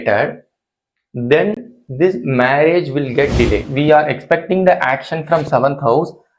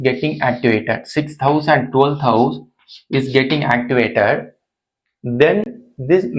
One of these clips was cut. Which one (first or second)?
first